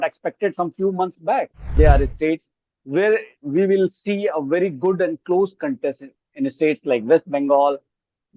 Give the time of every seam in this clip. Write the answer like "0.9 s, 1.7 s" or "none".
1.8 s